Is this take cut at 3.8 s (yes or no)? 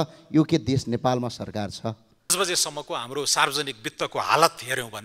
no